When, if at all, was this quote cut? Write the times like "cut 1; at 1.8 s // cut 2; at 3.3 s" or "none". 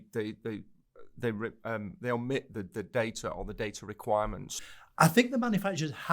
cut 1; at 4.5 s